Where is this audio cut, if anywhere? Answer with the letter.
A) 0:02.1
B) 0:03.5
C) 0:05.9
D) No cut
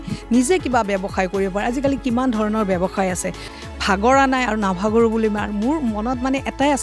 B